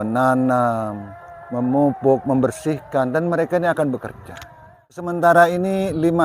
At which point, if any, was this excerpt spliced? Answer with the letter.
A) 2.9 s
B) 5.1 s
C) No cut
B